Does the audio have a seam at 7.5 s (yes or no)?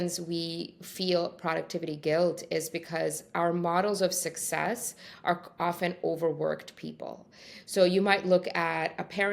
no